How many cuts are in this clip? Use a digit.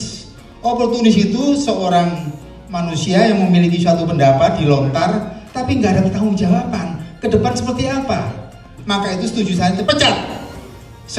2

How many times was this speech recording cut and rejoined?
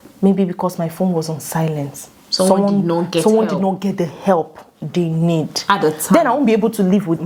0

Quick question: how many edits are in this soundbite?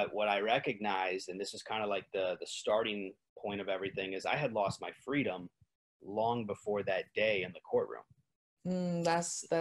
0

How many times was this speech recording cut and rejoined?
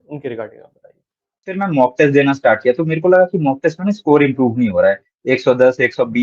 1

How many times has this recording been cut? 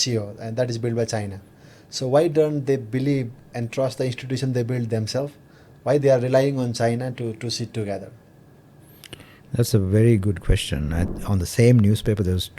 1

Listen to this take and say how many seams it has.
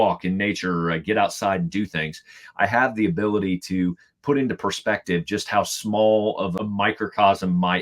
1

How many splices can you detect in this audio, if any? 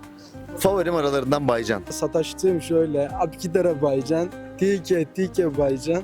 1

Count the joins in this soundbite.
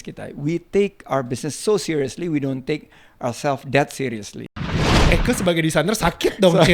1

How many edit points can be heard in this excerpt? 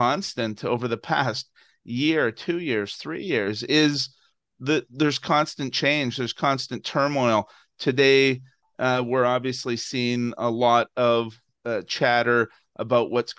0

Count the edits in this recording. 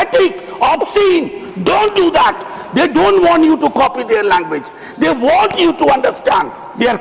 0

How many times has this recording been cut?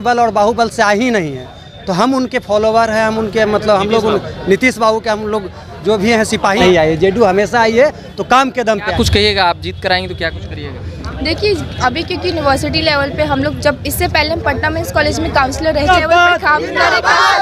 3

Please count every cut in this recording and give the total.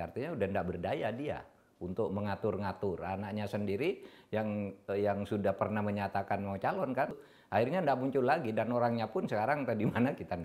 1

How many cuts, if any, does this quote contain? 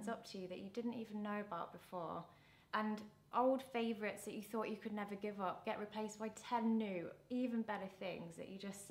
0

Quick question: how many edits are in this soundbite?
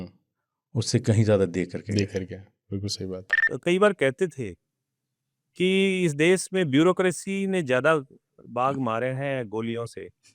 1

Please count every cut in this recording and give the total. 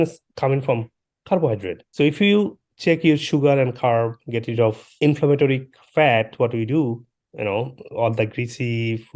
1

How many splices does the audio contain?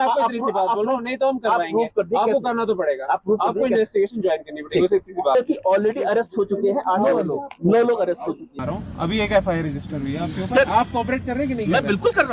2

